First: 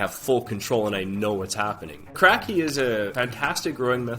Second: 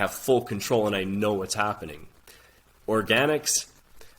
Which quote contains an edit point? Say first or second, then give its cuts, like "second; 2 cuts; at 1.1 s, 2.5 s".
first; 2 cuts; at 2.2 s, 3.1 s